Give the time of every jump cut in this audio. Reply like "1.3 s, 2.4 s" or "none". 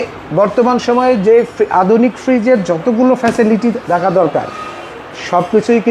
none